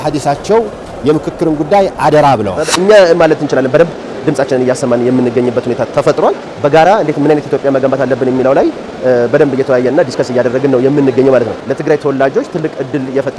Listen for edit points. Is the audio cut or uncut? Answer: cut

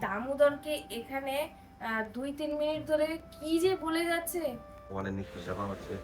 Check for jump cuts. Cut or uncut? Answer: cut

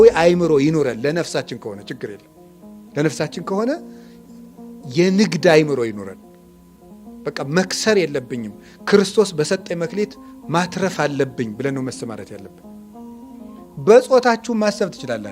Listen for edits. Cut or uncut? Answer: cut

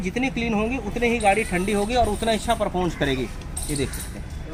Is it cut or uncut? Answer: uncut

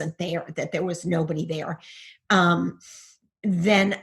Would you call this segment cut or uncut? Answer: uncut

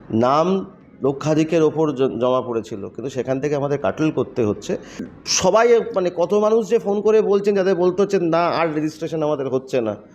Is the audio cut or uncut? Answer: cut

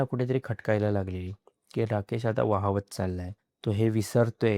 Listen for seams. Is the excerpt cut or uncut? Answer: uncut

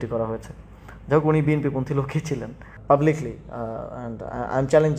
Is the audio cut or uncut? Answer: cut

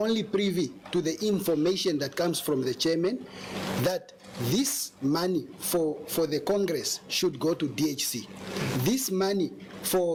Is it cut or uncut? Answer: uncut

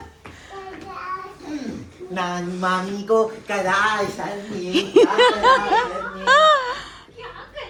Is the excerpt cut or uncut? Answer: uncut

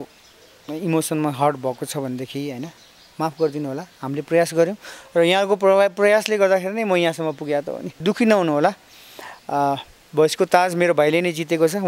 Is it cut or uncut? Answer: cut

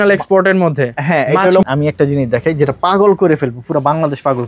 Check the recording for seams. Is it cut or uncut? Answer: cut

